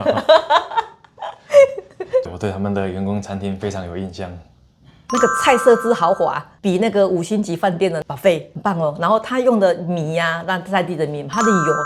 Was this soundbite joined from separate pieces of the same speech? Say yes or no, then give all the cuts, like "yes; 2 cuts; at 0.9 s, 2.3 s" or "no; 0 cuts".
yes; 1 cut; at 2.3 s